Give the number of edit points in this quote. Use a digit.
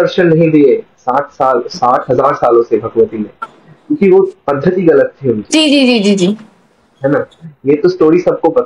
0